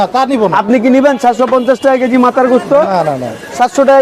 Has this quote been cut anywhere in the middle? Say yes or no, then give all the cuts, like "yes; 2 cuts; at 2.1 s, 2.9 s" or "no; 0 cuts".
no; 0 cuts